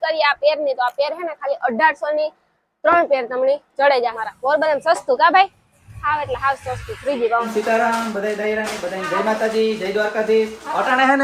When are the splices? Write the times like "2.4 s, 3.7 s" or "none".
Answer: 4.2 s, 7.5 s